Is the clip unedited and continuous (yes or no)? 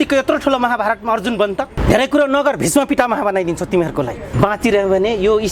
no